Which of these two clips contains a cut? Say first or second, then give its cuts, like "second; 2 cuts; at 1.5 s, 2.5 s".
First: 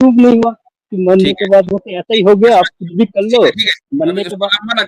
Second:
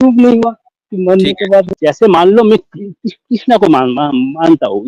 second; 1 cut; at 1.7 s